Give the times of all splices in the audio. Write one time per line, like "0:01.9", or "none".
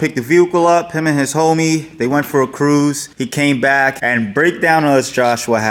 none